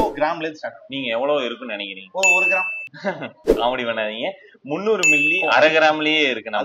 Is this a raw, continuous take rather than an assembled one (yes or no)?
yes